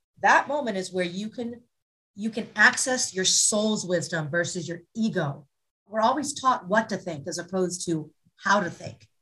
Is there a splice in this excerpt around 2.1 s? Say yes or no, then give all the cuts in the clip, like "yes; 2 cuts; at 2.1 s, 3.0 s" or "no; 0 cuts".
no; 1 cut; at 5.9 s